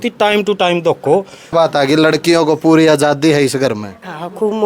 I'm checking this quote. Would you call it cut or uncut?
cut